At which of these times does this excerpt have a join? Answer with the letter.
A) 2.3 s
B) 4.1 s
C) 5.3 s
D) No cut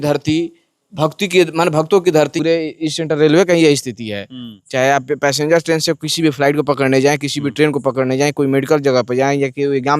A